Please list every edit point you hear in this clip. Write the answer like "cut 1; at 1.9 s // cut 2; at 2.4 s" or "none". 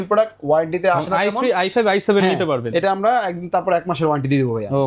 none